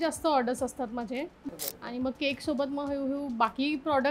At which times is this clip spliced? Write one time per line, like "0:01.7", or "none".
0:01.5